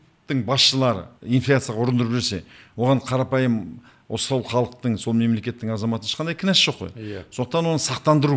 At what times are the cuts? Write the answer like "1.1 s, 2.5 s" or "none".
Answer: 1.1 s